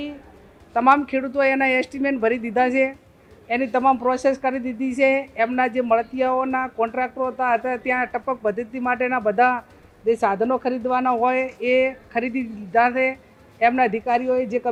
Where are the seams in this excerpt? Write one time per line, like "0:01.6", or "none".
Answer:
none